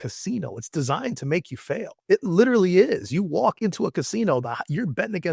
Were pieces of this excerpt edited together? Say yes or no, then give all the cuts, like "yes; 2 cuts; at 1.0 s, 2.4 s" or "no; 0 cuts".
no; 0 cuts